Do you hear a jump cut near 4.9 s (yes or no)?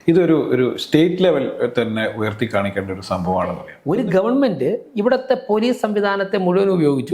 no